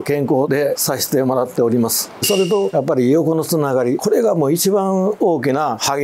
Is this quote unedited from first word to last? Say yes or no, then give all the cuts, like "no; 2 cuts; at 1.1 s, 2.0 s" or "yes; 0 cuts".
no; 1 cut; at 2.2 s